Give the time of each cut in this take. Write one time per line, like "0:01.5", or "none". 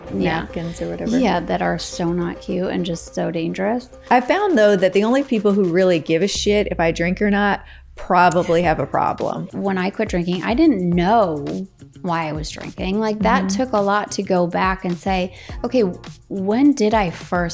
0:04.0
0:09.4